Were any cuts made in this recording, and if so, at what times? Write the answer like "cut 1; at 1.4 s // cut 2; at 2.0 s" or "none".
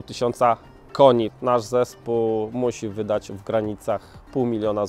cut 1; at 1.3 s